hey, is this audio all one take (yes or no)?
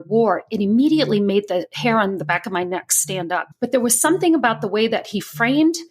no